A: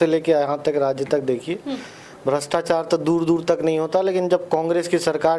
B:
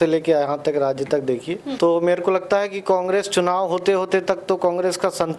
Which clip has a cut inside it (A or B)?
B